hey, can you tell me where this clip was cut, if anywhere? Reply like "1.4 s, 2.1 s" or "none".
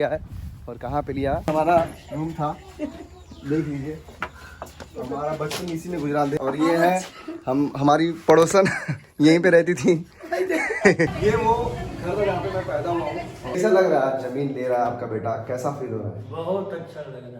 1.5 s, 6.3 s, 11.1 s, 13.6 s